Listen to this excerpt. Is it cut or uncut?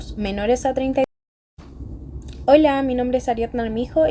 cut